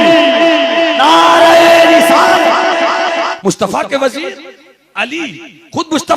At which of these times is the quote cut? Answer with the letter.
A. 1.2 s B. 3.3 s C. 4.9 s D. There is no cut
B